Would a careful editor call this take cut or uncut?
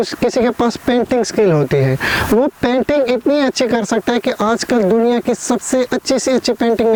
uncut